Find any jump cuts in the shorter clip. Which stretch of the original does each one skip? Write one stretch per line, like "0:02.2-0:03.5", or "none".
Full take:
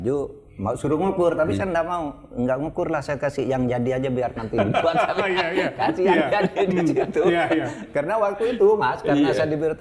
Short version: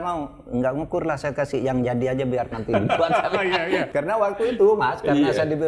0:05.7-0:07.9